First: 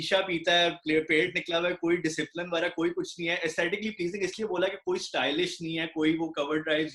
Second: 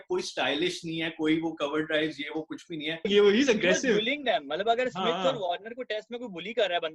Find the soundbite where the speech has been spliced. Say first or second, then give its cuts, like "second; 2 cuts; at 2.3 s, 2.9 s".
second; 1 cut; at 3.1 s